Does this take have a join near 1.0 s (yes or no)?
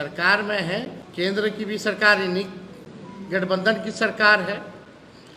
yes